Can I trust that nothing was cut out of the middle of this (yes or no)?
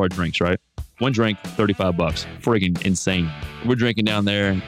no